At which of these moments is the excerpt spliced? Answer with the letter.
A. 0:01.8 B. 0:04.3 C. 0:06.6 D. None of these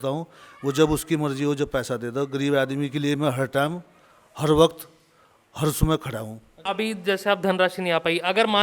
C